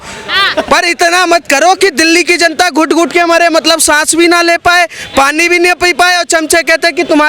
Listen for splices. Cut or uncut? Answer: uncut